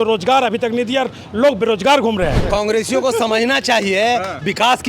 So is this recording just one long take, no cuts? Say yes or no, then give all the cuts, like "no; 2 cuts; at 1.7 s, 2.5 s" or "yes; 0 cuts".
no; 1 cut; at 2.4 s